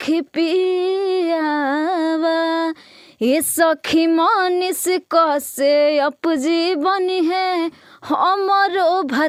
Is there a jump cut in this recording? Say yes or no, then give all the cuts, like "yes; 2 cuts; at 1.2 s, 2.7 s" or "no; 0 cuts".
no; 0 cuts